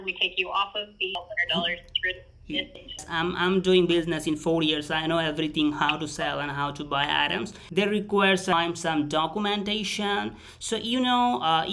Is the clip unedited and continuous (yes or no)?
no